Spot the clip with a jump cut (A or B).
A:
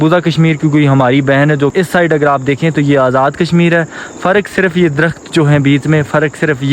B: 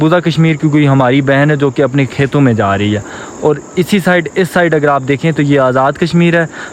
A